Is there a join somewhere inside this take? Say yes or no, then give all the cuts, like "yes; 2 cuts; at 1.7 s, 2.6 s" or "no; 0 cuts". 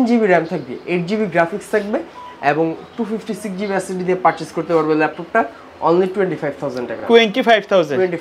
no; 0 cuts